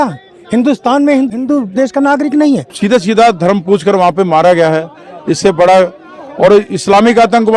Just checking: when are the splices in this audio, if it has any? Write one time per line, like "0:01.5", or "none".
0:01.4
0:02.7